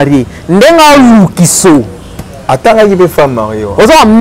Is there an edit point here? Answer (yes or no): no